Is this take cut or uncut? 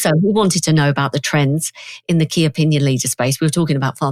uncut